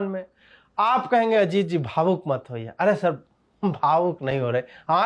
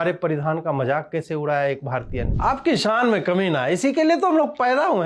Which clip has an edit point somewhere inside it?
second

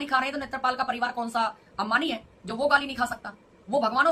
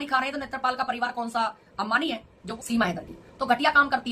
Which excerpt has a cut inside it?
second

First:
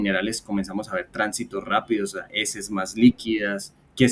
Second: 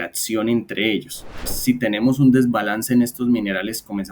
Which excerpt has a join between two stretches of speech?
second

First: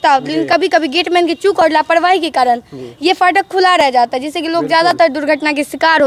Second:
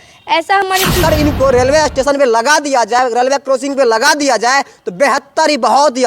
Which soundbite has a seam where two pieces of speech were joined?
second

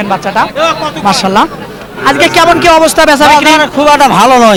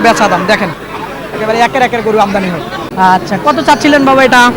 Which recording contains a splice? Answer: second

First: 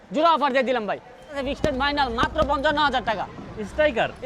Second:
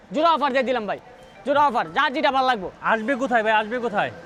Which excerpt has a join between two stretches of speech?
first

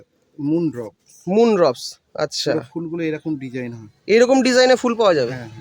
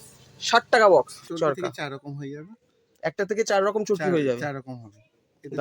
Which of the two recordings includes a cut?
second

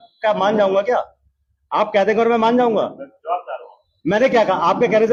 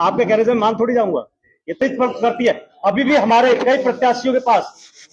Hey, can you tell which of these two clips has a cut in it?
second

